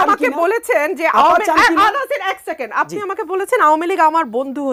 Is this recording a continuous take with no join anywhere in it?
yes; 0 cuts

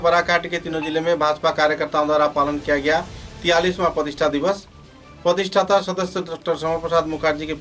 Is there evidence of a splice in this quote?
no; 0 cuts

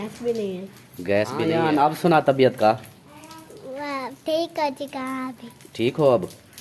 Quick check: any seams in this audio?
yes; 1 cut; at 1.5 s

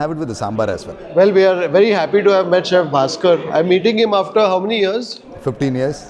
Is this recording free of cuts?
yes; 0 cuts

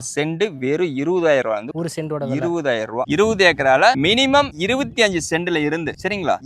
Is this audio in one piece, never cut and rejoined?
yes; 0 cuts

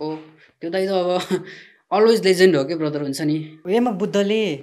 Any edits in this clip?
yes; 1 cut; at 3.6 s

